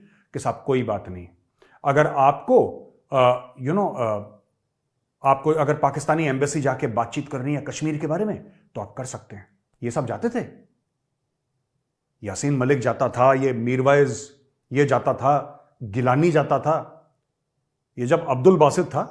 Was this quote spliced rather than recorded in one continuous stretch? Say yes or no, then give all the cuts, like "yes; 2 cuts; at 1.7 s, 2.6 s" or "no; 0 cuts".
no; 0 cuts